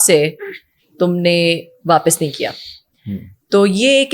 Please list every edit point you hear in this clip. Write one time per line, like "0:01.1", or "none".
none